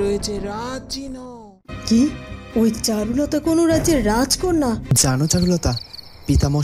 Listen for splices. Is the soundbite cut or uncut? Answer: cut